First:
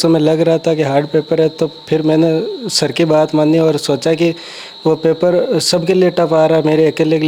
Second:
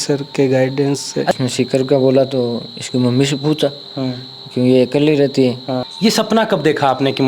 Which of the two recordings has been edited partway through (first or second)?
second